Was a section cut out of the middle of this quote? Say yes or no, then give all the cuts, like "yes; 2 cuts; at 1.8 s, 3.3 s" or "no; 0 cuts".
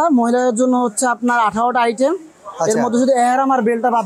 no; 0 cuts